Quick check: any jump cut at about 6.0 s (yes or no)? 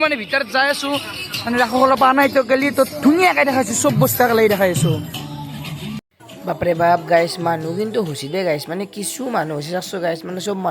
no